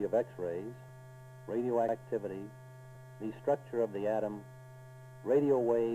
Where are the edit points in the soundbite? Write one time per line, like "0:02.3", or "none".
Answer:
0:01.8